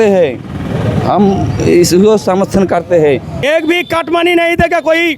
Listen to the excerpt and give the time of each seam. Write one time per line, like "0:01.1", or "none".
0:03.4